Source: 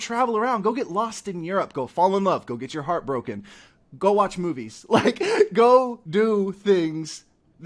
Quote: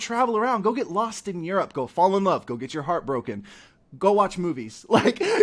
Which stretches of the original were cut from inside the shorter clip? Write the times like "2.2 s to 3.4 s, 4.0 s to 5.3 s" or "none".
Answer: none

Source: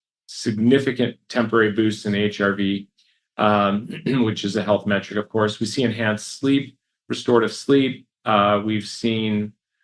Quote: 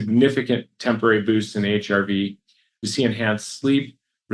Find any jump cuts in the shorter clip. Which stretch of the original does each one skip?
3.3 s to 5.6 s

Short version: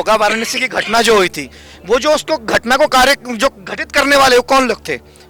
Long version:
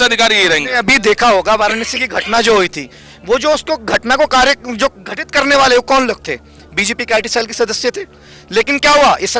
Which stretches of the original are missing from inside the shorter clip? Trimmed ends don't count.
none

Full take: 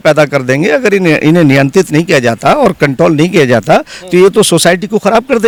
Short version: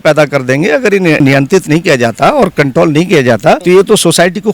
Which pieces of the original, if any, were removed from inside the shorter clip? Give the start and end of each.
1.2 s to 1.4 s, 3.8 s to 4.1 s

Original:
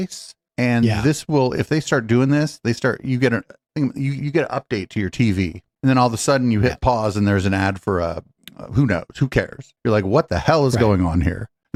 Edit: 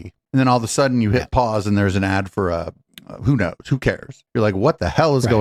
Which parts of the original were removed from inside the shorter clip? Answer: none

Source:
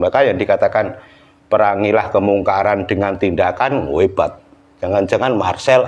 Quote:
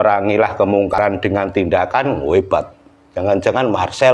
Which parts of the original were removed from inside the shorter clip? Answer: 2.5 s to 2.6 s

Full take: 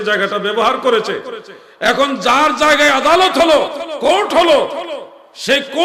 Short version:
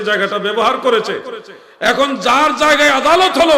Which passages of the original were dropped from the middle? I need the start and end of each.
none

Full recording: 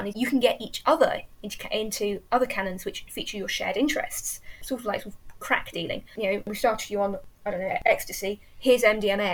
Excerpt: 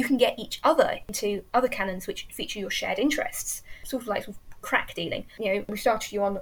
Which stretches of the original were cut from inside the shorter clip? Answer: 1.4 s to 1.9 s

